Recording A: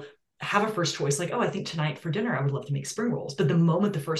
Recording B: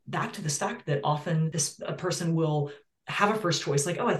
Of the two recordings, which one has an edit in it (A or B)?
B